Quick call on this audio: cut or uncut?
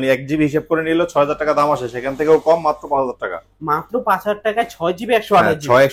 uncut